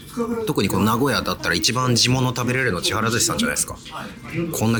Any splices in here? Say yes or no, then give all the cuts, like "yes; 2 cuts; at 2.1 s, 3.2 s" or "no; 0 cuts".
no; 0 cuts